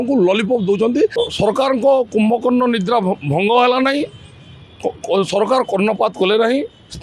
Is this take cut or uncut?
cut